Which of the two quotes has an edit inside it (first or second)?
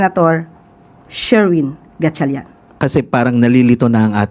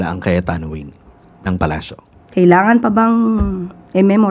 first